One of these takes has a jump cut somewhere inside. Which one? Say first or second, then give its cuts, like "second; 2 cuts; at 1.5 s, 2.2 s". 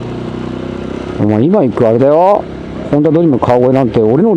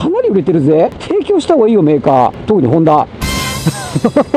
second; 2 cuts; at 1.0 s, 2.4 s